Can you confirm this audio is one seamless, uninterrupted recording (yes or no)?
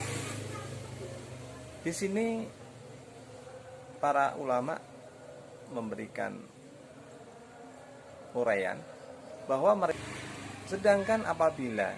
no